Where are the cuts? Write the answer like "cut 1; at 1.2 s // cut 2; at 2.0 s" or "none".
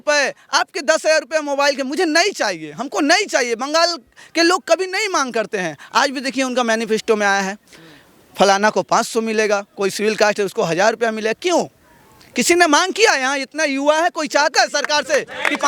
none